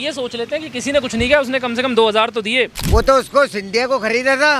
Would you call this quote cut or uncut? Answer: cut